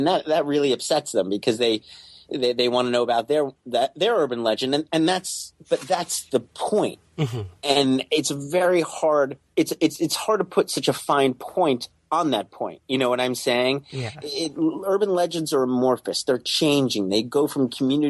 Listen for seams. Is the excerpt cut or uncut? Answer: uncut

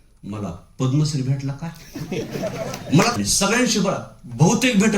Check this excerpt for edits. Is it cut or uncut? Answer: cut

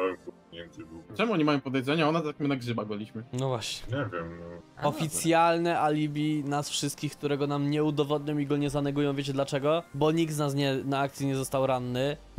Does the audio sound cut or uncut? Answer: cut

